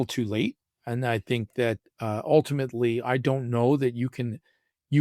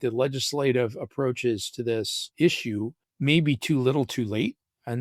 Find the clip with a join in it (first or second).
second